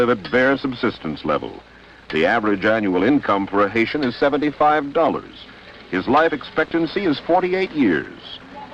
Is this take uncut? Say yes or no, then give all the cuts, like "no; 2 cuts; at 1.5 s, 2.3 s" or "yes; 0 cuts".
yes; 0 cuts